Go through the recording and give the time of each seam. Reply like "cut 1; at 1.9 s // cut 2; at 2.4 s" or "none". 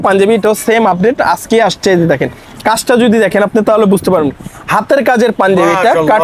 none